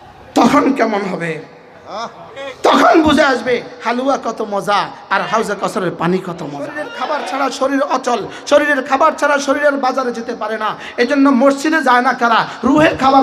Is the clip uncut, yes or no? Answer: no